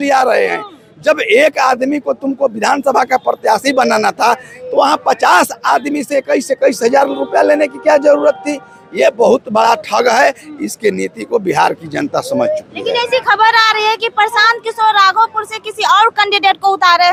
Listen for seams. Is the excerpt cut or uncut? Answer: uncut